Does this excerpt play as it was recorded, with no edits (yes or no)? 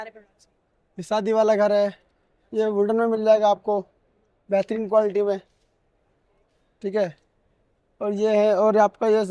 yes